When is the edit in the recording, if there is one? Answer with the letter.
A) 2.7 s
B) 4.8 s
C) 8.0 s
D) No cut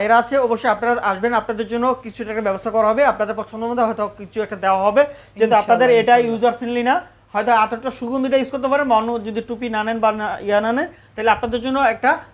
D